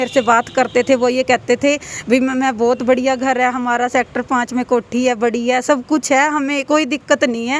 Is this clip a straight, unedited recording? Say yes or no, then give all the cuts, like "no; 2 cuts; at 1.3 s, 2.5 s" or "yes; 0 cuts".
yes; 0 cuts